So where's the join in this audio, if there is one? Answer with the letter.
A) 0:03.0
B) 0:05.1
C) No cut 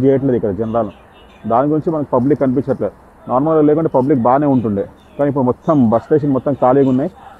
C